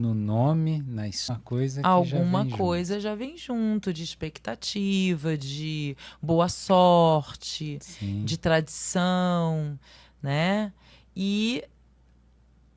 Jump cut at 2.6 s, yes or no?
no